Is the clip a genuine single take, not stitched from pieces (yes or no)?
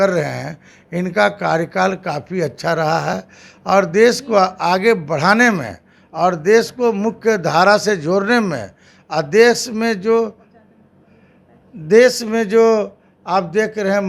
yes